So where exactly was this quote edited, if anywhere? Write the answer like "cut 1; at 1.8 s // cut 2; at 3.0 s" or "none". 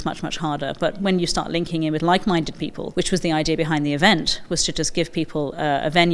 cut 1; at 2.7 s